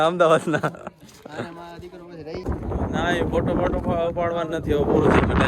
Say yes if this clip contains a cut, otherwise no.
yes